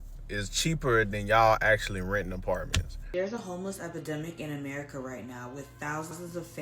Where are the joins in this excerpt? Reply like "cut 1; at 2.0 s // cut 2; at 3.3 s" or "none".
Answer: cut 1; at 3.0 s